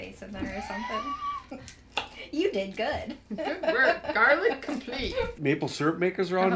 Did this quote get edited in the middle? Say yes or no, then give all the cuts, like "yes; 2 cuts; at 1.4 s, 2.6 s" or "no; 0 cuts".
yes; 1 cut; at 5.3 s